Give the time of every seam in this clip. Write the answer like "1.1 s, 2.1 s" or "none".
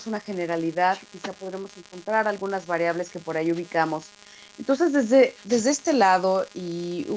3.1 s